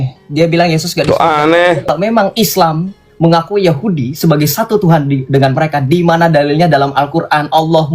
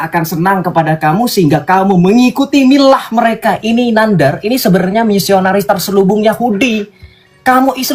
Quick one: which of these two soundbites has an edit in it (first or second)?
first